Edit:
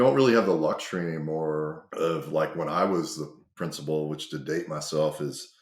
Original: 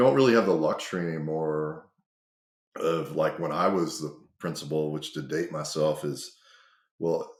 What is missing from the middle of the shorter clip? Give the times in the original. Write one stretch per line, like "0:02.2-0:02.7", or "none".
0:01.8-0:02.7